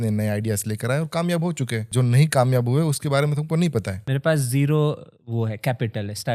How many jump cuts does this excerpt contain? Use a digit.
2